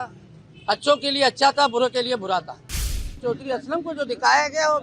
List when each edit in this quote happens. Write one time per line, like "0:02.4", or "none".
0:03.1